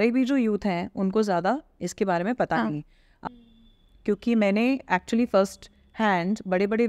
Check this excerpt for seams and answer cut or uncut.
cut